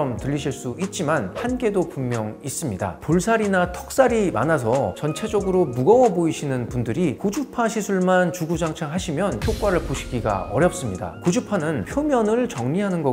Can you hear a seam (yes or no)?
no